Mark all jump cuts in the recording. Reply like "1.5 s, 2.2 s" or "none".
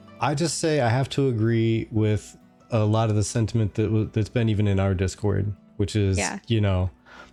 none

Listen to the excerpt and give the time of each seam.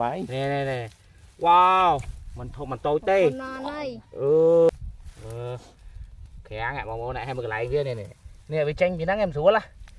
none

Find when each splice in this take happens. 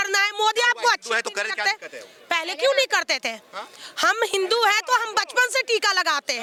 none

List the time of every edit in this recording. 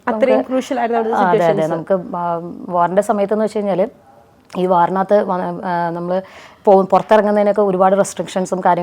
none

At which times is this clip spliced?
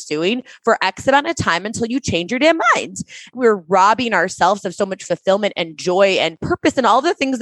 3.3 s, 6.4 s

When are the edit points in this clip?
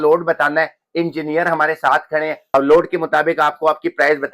2.5 s

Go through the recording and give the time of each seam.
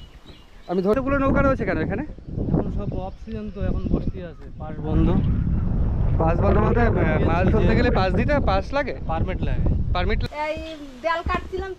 0.9 s, 10.2 s

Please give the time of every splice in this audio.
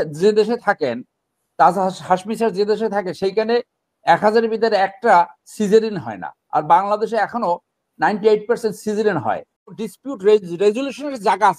9.9 s

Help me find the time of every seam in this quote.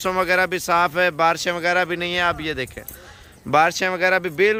none

